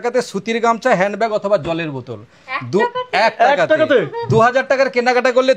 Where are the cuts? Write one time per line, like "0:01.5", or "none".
none

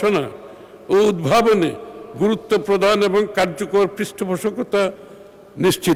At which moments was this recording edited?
none

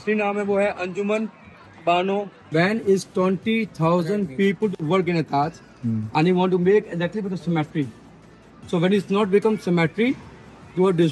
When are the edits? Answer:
0:02.5

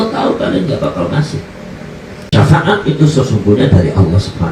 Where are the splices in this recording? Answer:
0:02.3

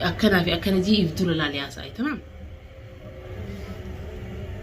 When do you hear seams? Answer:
0:02.5

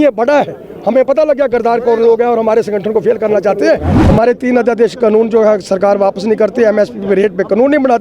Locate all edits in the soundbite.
0:03.9

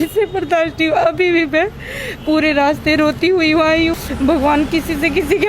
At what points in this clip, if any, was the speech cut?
0:04.0

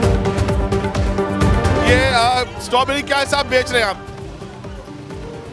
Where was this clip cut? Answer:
none

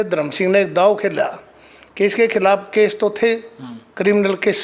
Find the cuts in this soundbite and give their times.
none

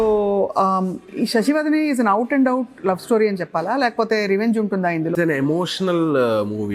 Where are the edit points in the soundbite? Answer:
0:05.1

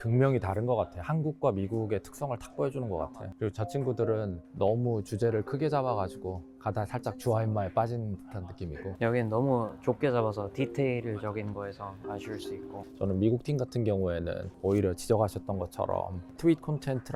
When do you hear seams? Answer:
none

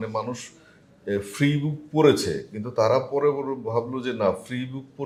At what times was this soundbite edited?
none

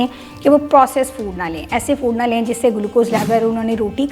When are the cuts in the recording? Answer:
0:03.2

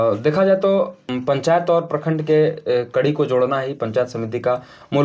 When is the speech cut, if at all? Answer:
0:01.0

